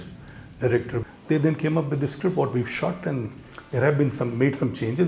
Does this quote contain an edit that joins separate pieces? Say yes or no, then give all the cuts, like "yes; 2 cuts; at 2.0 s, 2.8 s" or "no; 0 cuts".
yes; 1 cut; at 1.0 s